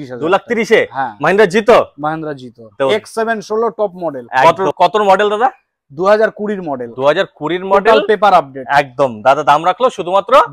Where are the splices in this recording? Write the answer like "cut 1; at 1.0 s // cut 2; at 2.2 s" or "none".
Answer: none